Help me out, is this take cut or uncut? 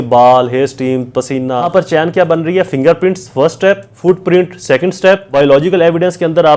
cut